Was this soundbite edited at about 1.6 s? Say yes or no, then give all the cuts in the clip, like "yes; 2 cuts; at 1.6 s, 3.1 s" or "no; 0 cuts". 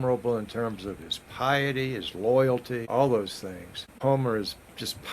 no; 2 cuts; at 2.8 s, 4.0 s